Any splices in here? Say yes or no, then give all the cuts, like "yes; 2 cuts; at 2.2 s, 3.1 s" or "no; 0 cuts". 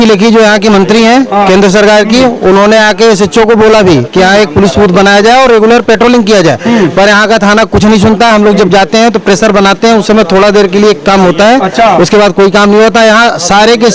no; 0 cuts